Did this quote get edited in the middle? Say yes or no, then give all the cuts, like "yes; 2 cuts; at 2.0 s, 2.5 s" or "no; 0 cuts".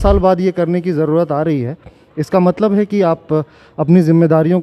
no; 0 cuts